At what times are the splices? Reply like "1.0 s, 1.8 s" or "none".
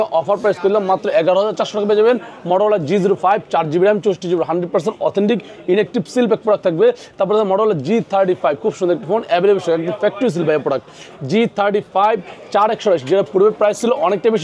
none

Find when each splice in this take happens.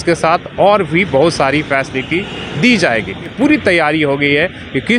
3.3 s

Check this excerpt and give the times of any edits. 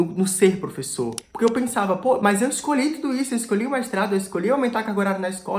1.2 s

